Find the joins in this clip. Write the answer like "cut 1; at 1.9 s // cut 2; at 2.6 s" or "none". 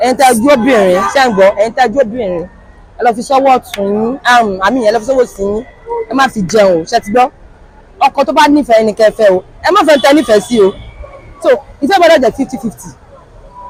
none